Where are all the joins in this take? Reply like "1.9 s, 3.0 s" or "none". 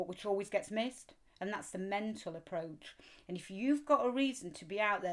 none